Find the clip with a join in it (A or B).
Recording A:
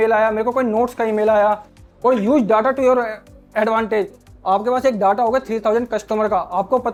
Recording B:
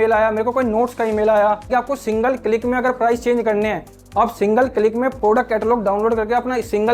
B